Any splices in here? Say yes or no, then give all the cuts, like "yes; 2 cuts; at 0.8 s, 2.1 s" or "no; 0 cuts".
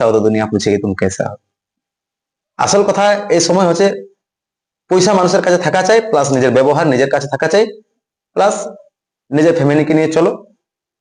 no; 0 cuts